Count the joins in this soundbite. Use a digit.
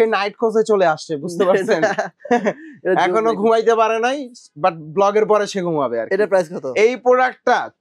0